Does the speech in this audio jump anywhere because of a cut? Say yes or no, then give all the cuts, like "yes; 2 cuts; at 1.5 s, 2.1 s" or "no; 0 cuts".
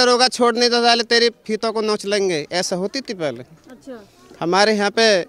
no; 0 cuts